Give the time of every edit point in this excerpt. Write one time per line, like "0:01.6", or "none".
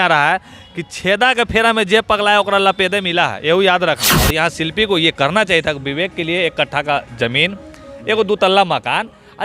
0:04.2